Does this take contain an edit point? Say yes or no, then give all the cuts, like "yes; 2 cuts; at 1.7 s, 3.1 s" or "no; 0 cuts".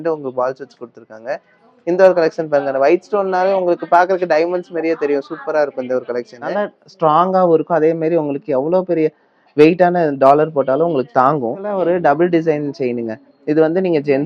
yes; 2 cuts; at 6.5 s, 11.8 s